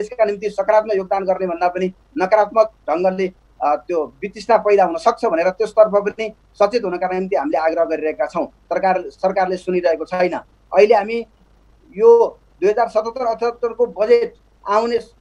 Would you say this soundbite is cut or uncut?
uncut